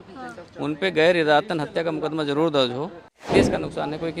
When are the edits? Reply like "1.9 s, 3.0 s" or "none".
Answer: 3.3 s